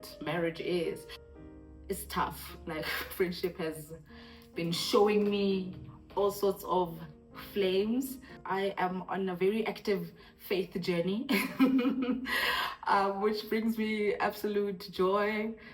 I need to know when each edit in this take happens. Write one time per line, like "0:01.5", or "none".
0:01.1
0:08.3